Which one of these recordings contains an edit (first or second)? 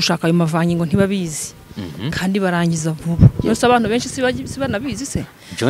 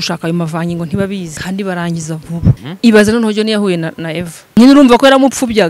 second